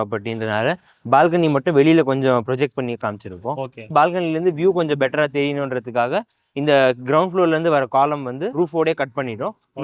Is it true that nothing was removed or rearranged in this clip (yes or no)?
no